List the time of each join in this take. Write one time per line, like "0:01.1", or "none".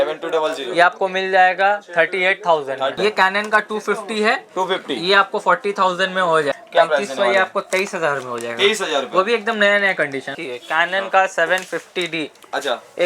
0:03.0
0:06.5
0:10.3

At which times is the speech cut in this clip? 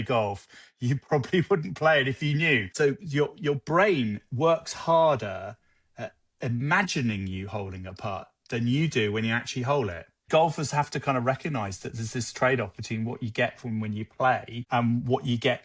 0:02.7
0:10.3
0:14.5

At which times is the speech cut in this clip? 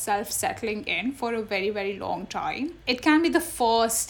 0:02.8

